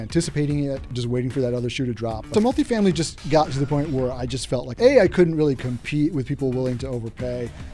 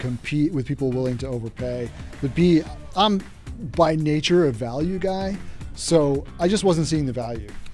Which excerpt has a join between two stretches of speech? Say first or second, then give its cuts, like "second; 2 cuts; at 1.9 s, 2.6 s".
first; 3 cuts; at 0.9 s, 2.3 s, 4.7 s